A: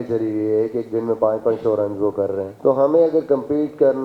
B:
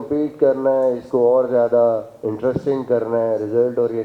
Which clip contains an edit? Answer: A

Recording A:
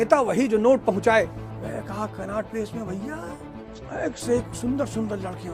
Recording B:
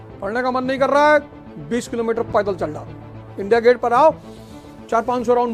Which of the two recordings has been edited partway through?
A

